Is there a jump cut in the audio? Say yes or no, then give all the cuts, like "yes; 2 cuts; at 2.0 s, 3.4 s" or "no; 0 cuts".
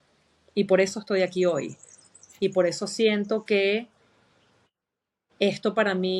no; 0 cuts